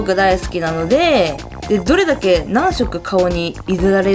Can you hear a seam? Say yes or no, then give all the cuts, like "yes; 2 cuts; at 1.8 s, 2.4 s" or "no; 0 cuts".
no; 0 cuts